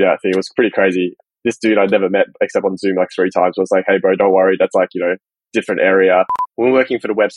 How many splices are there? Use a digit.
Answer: 2